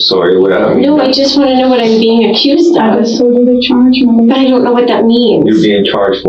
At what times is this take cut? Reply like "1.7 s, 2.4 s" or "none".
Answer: none